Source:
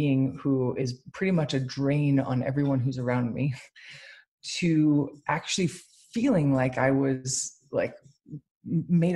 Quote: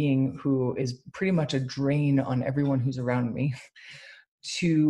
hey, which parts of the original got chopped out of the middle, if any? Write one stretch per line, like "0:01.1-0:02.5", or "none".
none